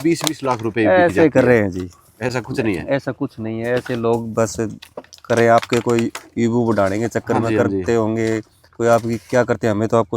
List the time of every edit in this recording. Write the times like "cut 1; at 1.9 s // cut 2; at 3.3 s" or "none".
none